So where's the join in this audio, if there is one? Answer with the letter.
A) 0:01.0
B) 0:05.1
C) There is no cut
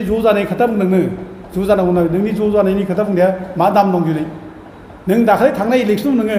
C